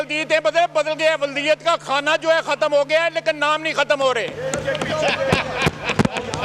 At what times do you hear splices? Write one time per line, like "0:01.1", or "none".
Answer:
none